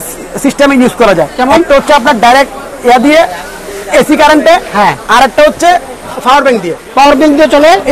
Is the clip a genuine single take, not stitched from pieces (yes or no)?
yes